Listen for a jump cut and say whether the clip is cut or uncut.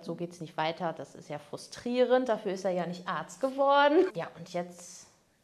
cut